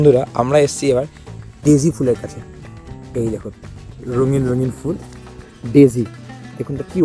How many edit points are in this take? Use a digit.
0